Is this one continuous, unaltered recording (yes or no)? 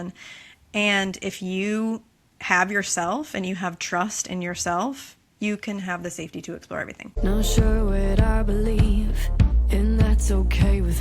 no